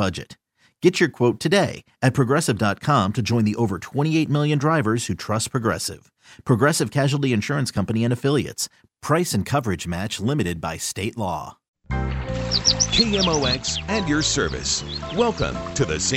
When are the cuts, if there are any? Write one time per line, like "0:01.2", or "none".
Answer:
0:11.9